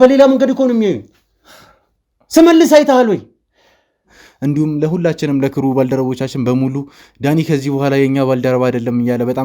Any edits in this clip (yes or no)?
yes